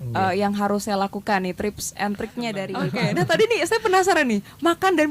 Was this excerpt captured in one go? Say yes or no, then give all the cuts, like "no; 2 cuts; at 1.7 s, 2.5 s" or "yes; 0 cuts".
no; 1 cut; at 2.7 s